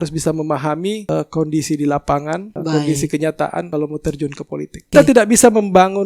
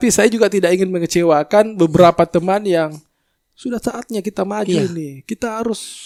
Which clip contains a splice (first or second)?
first